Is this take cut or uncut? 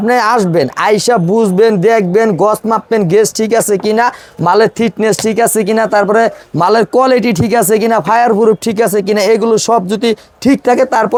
uncut